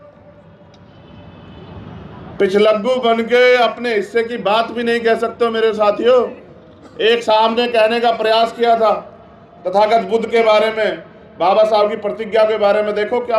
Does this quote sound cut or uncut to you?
uncut